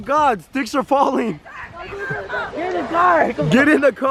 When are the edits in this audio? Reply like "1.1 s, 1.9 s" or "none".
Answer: none